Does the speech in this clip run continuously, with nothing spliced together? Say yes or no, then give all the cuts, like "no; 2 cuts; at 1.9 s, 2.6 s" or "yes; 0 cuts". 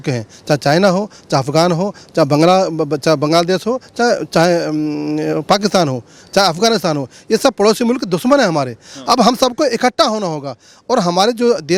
yes; 0 cuts